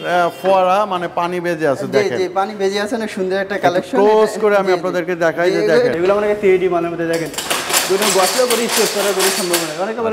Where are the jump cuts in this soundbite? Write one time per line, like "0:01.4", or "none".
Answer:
0:05.9